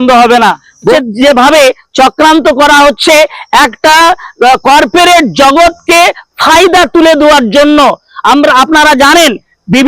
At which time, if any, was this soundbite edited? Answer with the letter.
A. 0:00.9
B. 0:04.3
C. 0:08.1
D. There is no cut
A